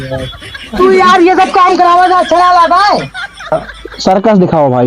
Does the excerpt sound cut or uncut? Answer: cut